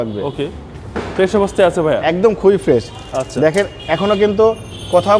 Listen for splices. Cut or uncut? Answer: uncut